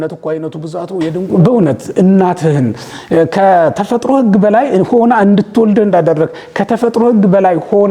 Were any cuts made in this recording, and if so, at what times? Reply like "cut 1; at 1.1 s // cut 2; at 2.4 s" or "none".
cut 1; at 1.2 s